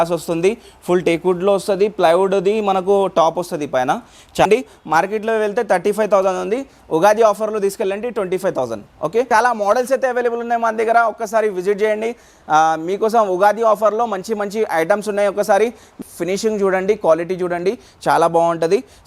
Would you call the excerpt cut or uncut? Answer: cut